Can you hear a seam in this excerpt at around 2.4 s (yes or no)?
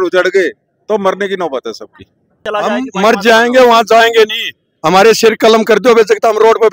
yes